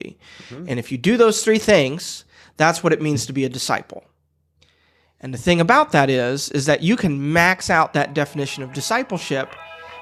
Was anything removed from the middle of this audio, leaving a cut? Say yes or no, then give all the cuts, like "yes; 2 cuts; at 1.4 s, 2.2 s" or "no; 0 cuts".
no; 0 cuts